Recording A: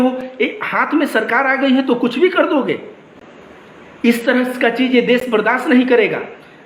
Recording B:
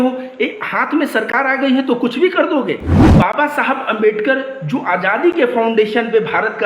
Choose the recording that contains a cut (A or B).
B